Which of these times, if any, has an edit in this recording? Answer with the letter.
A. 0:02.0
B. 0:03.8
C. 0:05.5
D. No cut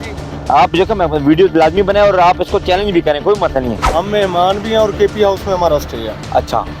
B